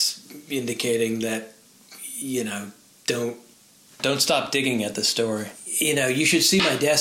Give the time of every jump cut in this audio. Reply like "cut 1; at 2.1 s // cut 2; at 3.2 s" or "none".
cut 1; at 5.6 s